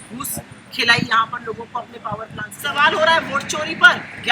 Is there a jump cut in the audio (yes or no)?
yes